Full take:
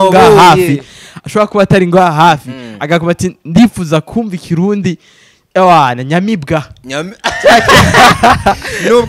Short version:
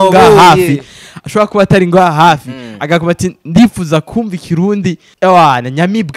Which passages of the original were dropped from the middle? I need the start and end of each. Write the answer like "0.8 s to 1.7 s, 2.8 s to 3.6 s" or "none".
5.1 s to 5.4 s